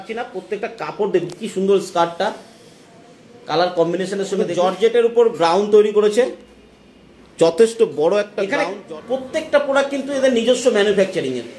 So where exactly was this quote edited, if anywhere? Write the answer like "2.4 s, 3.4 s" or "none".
4.4 s, 8.4 s